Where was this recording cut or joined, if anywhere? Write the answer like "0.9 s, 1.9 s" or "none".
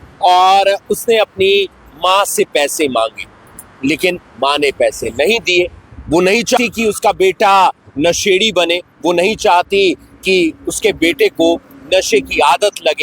6.6 s